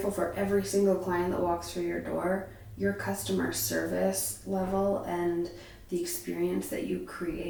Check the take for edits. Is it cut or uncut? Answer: uncut